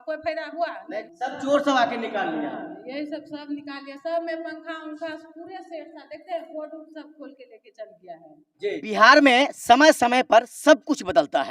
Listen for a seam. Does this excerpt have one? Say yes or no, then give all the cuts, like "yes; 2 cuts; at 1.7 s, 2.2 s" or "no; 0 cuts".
yes; 2 cuts; at 1.1 s, 8.8 s